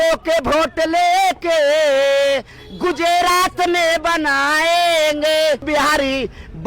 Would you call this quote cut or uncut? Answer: cut